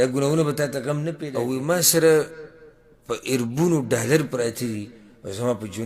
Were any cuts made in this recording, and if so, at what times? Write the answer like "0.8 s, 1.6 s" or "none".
1.2 s